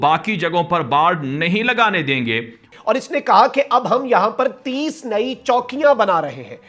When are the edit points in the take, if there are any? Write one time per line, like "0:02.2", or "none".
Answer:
0:02.7

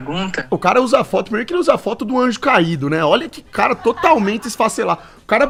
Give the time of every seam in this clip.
none

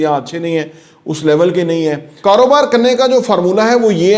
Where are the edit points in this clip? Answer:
0:02.1

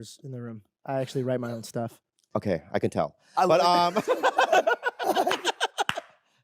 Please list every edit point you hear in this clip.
none

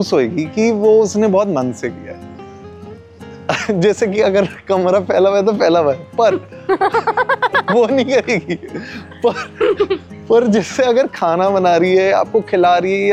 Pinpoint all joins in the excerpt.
none

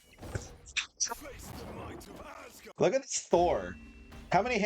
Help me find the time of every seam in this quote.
0:02.6

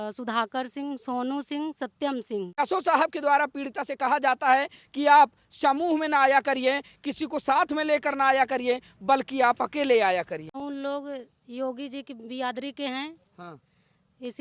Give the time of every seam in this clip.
0:02.6
0:10.6

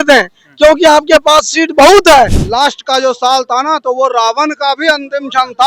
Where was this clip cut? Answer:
0:02.4

